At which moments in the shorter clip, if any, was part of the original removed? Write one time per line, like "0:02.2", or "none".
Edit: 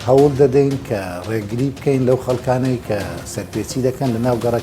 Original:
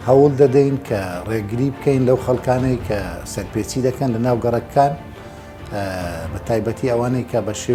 none